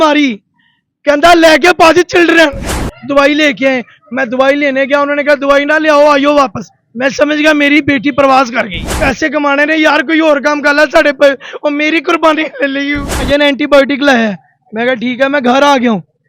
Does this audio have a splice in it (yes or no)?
yes